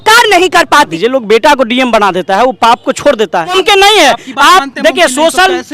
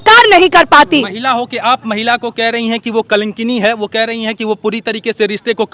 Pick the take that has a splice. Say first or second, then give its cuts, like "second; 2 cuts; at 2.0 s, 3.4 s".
first; 2 cuts; at 0.9 s, 3.5 s